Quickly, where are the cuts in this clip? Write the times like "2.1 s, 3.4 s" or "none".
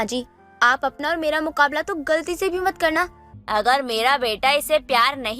3.3 s